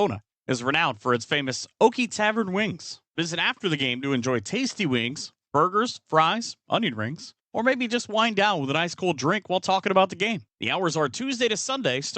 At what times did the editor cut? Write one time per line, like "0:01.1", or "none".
0:01.0